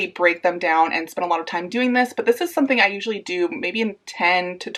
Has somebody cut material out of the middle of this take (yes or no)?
no